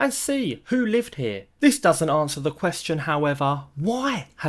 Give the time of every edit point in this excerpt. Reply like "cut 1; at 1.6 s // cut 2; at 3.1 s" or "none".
cut 1; at 1.4 s